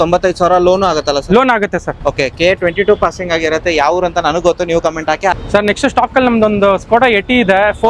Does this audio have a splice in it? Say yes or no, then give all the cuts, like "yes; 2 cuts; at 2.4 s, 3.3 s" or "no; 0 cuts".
no; 0 cuts